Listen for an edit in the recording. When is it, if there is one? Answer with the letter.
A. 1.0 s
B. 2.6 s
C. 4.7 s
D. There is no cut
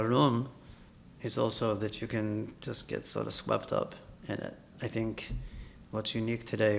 C